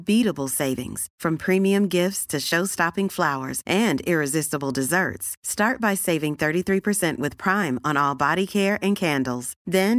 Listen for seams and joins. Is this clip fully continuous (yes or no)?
yes